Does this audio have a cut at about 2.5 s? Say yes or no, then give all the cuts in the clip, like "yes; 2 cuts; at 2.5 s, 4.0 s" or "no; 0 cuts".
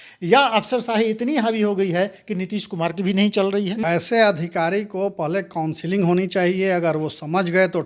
no; 1 cut; at 3.8 s